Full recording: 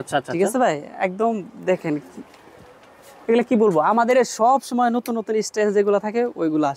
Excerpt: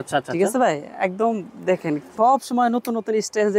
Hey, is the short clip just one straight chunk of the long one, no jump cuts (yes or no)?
no